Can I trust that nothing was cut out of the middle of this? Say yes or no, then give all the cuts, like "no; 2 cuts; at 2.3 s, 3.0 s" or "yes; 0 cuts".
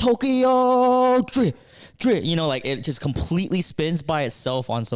yes; 0 cuts